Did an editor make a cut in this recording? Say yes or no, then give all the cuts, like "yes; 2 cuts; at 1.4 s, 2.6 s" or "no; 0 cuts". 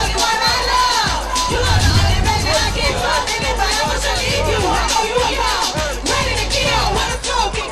no; 0 cuts